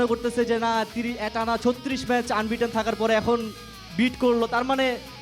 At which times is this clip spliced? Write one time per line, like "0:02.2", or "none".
none